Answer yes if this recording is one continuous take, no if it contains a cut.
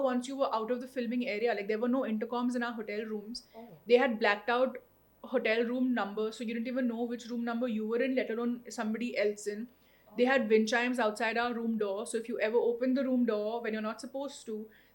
yes